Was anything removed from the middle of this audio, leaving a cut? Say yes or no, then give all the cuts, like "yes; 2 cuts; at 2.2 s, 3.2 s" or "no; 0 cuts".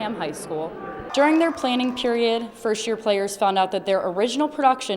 yes; 1 cut; at 1.1 s